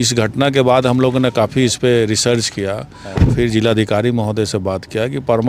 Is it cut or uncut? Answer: uncut